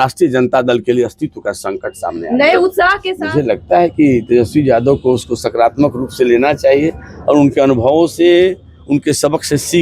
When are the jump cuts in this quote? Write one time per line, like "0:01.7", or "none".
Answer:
0:03.1